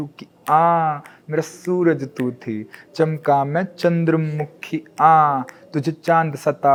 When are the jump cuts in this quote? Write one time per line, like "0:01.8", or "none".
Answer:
none